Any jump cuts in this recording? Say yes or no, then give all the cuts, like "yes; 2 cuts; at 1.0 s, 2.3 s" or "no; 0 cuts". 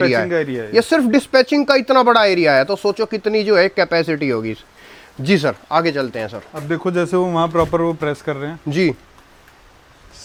no; 0 cuts